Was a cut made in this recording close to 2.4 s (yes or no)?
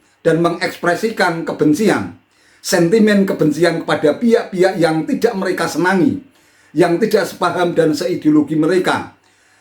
no